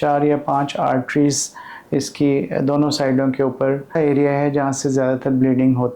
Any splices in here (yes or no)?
yes